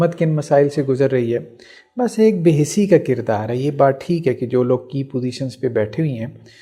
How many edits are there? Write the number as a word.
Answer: zero